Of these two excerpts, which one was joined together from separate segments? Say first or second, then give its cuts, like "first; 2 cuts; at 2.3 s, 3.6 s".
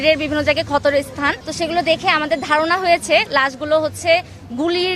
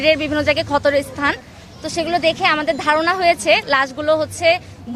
first; 1 cut; at 1.4 s